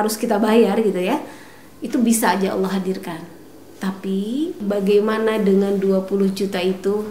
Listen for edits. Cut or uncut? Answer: cut